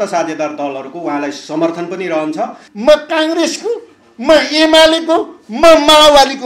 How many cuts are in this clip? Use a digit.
1